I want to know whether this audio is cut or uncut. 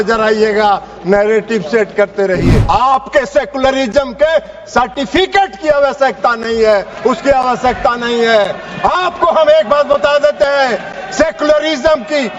cut